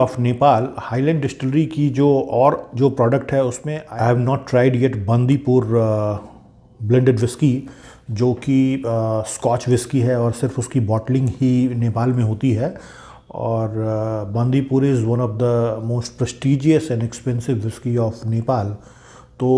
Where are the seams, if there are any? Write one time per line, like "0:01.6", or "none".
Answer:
none